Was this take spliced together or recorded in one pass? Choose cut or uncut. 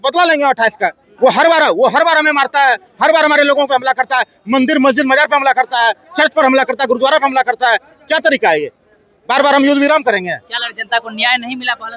cut